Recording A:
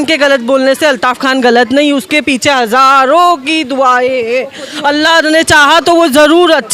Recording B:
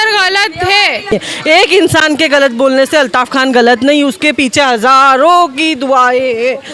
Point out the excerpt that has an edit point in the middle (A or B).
B